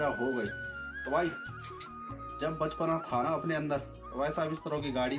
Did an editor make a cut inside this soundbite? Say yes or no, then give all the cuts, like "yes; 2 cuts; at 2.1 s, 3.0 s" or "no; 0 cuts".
no; 0 cuts